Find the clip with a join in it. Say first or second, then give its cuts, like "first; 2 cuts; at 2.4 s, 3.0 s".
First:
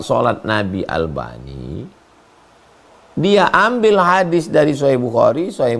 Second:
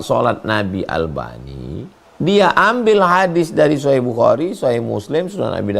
second; 1 cut; at 2.0 s